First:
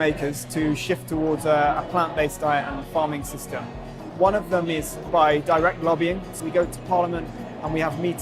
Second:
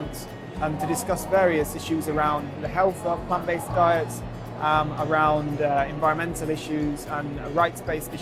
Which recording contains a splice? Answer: first; 2 cuts; at 4.0 s, 6.3 s

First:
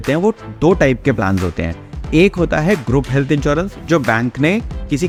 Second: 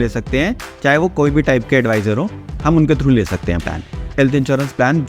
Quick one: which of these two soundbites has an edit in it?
second; 1 cut; at 4.1 s

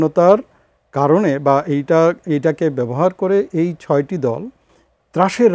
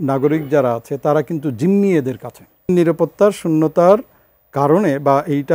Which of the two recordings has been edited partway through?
second; 1 cut; at 2.7 s

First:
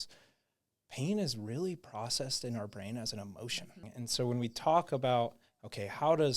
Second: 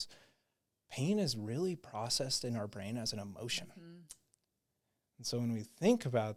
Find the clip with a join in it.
first; 1 cut; at 3.9 s

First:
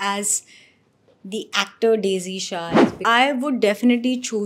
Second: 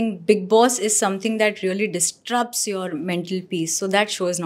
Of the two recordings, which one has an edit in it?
first; 1 cut; at 3.0 s

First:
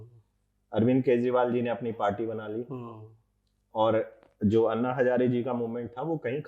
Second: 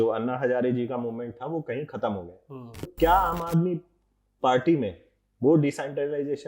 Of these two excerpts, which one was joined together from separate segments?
second; 1 cut; at 2.9 s

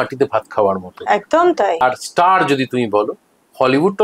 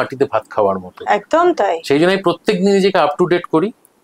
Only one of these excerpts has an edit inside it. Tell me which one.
first; 1 cut; at 1.8 s

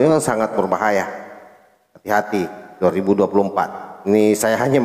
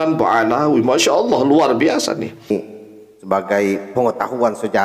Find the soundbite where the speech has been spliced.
second; 1 cut; at 2.5 s

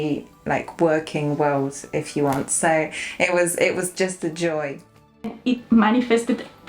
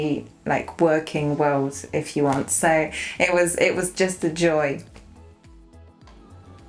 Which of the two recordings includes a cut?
first; 1 cut; at 5.4 s

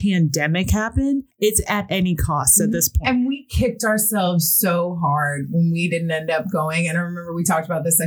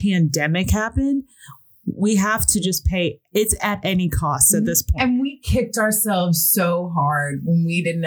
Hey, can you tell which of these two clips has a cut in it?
first; 1 cut; at 1.3 s

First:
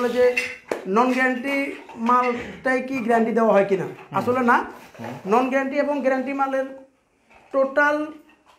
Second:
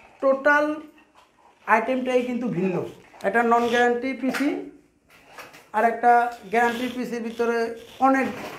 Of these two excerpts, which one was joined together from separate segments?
second; 1 cut; at 3.0 s

